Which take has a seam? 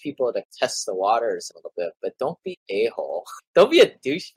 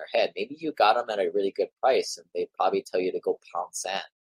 first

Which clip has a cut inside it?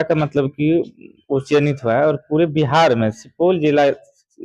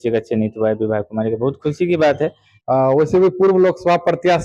second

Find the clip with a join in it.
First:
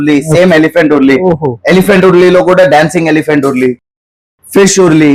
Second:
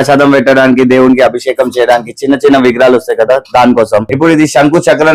second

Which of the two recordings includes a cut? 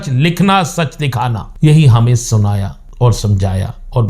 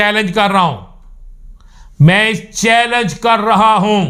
first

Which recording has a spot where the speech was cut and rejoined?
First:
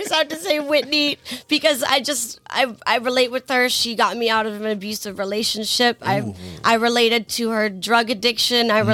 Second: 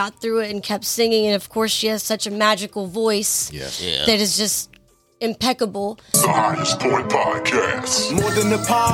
second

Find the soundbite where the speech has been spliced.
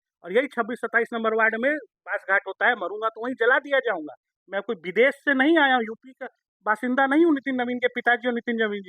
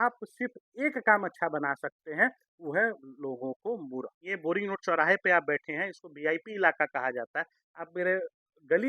second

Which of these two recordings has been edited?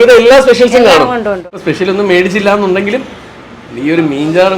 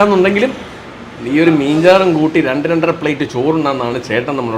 first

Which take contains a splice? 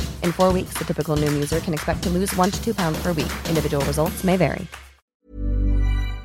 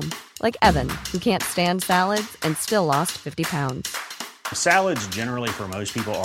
first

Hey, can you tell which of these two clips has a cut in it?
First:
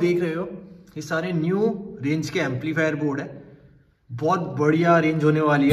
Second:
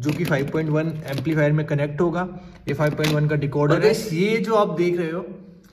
second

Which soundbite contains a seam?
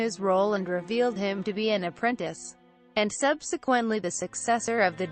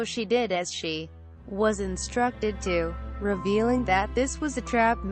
first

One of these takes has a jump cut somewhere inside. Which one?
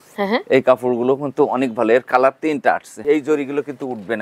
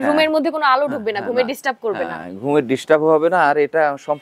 first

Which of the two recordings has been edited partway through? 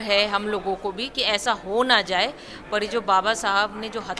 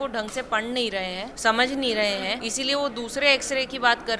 second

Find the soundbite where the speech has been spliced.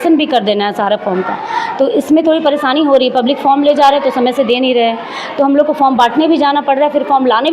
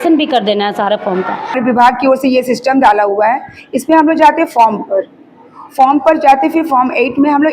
second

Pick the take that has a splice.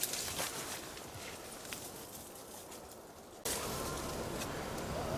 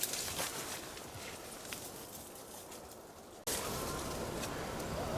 second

